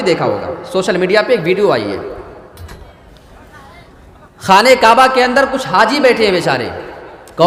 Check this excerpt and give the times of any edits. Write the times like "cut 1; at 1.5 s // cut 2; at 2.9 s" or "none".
none

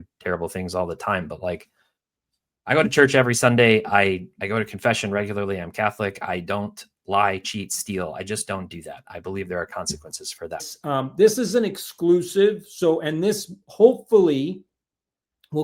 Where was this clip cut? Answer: cut 1; at 10.7 s

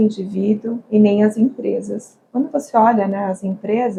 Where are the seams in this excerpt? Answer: none

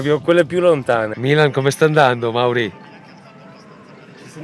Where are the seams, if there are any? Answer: cut 1; at 1.1 s

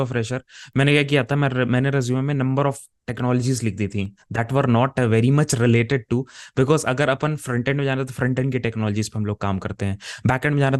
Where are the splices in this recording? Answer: none

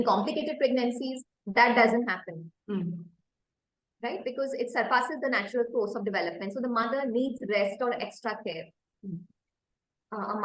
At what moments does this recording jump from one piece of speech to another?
cut 1; at 1.0 s

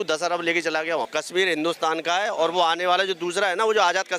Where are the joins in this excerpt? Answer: cut 1; at 1.1 s

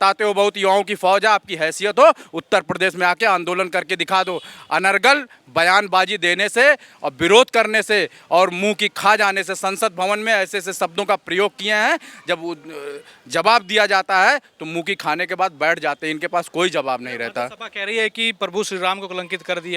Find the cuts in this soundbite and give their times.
none

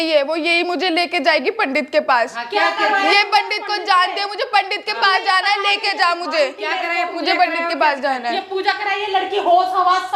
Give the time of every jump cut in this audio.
none

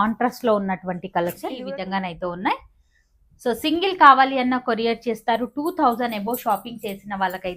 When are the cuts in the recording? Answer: cut 1; at 1.6 s

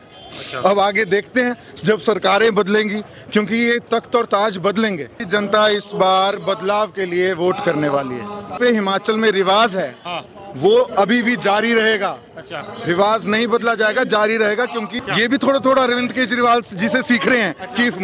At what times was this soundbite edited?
cut 1; at 5.2 s // cut 2; at 8.6 s // cut 3; at 15.0 s

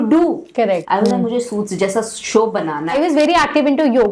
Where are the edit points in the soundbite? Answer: cut 1; at 0.8 s // cut 2; at 2.9 s

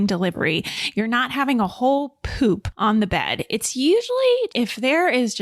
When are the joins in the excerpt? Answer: cut 1; at 2.7 s

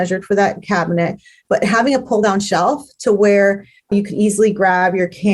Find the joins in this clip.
cut 1; at 3.9 s

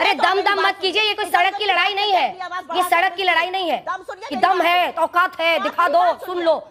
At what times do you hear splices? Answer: none

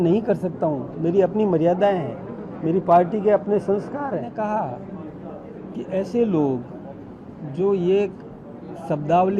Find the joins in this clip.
cut 1; at 4.3 s

